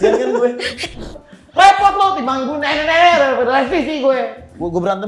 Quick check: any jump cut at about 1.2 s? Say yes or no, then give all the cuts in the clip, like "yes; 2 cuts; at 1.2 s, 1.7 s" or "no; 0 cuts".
yes; 1 cut; at 1.2 s